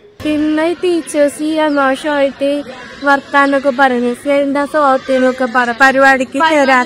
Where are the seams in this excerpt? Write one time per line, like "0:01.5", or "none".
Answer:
none